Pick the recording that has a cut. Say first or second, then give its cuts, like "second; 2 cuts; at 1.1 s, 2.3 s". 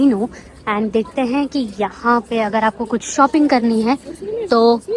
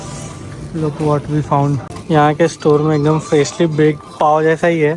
second; 1 cut; at 1.9 s